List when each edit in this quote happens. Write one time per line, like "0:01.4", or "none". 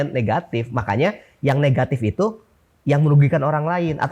none